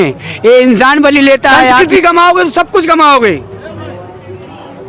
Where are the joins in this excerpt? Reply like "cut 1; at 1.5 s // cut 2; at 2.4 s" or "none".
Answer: cut 1; at 1.8 s